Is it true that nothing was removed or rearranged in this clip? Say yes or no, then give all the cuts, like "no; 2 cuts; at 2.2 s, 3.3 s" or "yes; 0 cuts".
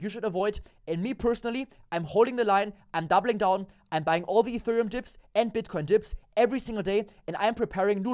yes; 0 cuts